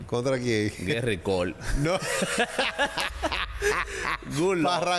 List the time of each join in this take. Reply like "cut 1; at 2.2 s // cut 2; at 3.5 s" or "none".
none